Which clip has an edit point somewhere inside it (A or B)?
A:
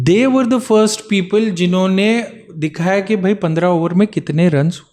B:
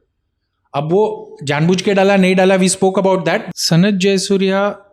B